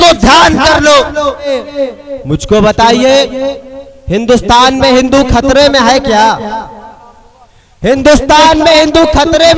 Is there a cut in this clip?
yes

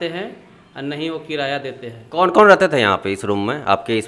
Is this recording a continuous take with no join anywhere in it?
yes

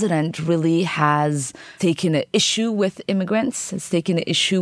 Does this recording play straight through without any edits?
yes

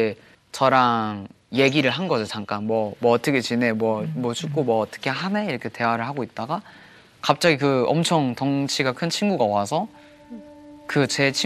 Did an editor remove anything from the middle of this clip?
no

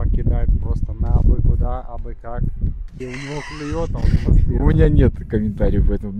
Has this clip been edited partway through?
no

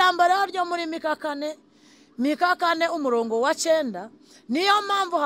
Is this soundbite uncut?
yes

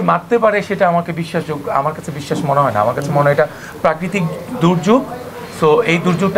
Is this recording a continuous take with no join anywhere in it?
yes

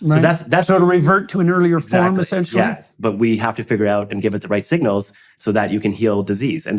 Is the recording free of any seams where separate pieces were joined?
no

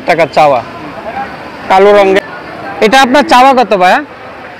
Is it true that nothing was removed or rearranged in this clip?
no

